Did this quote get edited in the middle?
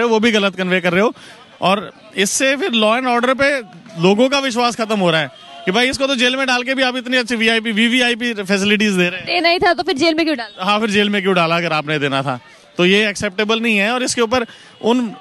no; 0 cuts

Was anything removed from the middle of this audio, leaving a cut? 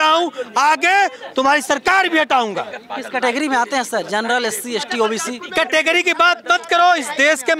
no; 0 cuts

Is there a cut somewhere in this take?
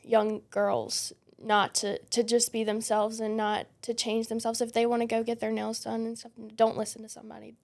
no; 0 cuts

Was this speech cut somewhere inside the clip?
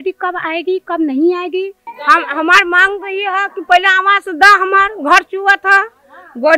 yes; 1 cut; at 1.9 s

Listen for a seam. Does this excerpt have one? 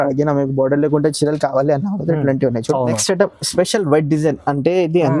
yes; 1 cut; at 3.0 s

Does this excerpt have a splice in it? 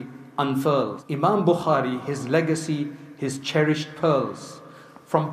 yes; 1 cut; at 1.0 s

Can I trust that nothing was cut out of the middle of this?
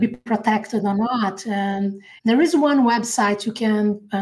no; 1 cut; at 2.0 s

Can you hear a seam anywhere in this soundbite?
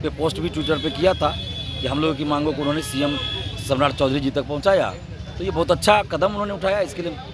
no; 0 cuts

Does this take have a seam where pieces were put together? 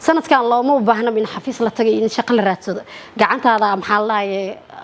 no; 0 cuts

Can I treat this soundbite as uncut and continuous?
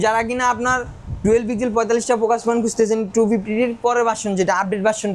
yes; 0 cuts

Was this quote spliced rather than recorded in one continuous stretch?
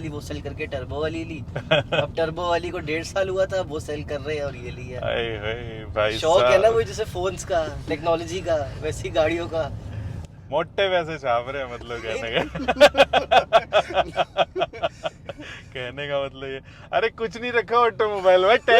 no; 0 cuts

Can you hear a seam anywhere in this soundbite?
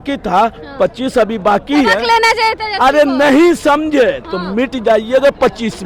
no; 0 cuts

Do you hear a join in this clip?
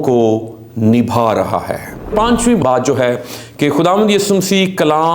yes; 1 cut; at 2.5 s

